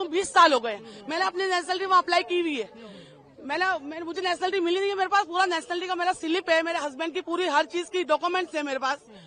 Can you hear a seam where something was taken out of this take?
no; 0 cuts

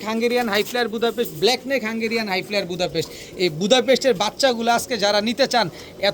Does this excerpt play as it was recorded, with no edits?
yes; 0 cuts

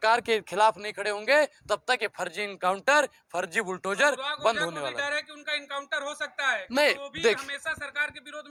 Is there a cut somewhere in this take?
no; 0 cuts

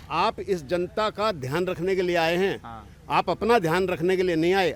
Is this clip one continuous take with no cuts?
yes; 0 cuts

